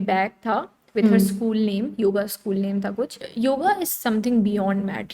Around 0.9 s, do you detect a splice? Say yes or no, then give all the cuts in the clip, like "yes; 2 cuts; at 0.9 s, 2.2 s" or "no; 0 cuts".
no; 1 cut; at 3.2 s